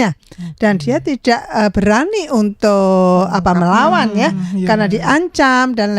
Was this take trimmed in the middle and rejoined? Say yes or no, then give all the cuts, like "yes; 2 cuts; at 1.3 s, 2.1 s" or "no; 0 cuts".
no; 0 cuts